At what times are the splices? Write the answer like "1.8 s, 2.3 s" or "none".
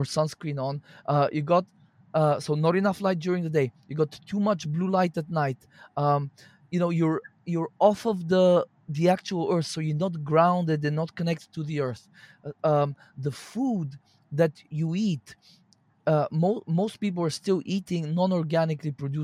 none